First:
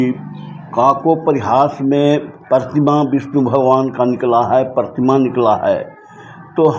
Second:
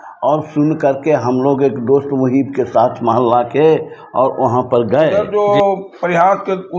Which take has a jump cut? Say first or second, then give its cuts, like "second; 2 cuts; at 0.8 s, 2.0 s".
second; 1 cut; at 5.2 s